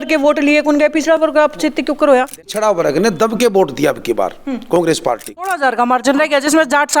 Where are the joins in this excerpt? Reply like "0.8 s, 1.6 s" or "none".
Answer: 2.4 s, 5.6 s